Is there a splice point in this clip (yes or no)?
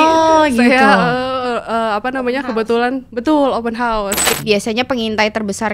yes